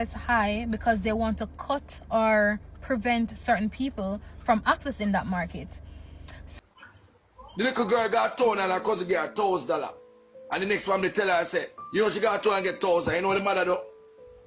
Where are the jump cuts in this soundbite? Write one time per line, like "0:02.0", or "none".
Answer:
0:06.5